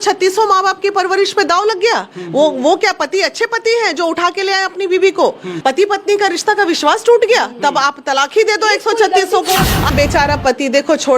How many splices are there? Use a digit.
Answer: 2